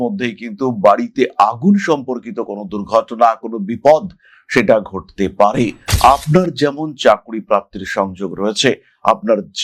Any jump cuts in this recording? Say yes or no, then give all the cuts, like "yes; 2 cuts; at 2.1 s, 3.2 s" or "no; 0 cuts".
yes; 1 cut; at 5.8 s